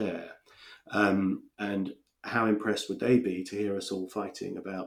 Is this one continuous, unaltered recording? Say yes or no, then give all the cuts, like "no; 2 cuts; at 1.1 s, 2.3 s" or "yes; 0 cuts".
yes; 0 cuts